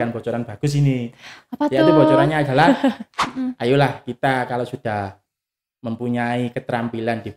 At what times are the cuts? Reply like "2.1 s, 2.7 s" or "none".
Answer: 3.1 s